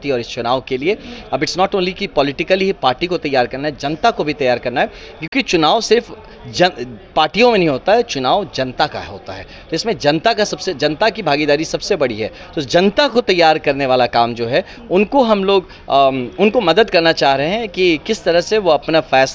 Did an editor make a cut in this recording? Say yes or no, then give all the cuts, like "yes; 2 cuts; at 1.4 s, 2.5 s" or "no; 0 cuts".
no; 0 cuts